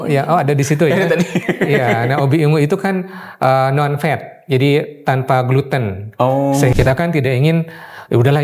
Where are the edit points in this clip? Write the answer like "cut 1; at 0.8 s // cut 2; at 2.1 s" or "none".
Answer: cut 1; at 6.7 s

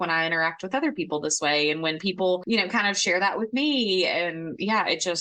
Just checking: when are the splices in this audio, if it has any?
none

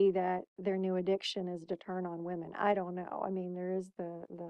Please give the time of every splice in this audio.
none

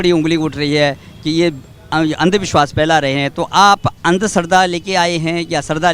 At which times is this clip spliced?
none

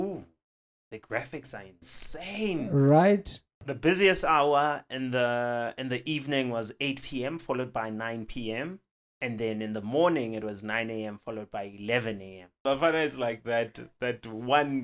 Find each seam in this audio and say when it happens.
cut 1; at 3.7 s // cut 2; at 12.5 s

